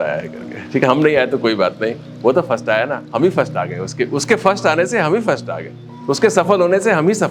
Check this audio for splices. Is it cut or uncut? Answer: uncut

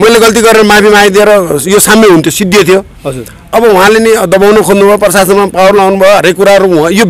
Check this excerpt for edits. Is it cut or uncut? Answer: uncut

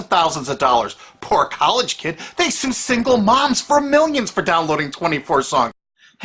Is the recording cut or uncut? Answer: uncut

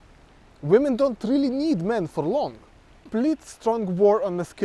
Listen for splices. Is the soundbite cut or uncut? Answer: cut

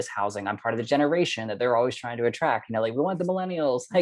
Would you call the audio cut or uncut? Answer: uncut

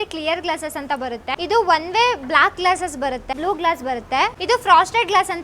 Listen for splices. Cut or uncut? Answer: cut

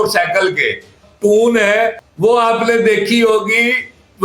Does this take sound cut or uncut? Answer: cut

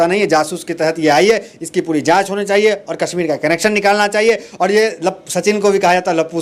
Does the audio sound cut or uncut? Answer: uncut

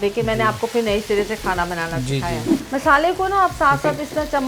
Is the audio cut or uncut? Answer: cut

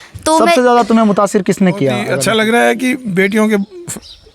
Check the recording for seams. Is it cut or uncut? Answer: cut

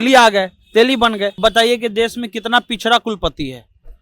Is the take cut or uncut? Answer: cut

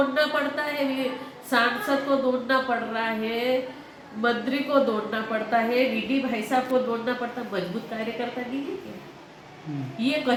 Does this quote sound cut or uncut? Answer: uncut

